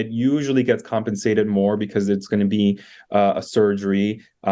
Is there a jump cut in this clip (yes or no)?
no